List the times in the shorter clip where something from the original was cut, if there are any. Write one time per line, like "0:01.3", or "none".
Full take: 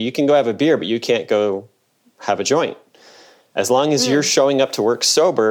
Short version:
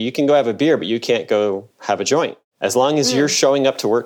0:01.7
0:02.4